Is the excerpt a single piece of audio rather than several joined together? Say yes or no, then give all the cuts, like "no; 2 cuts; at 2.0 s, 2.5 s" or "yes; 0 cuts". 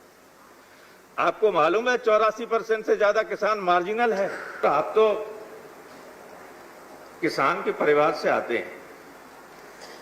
no; 1 cut; at 4.6 s